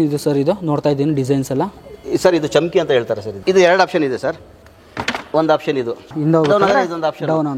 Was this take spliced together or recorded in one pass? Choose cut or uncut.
cut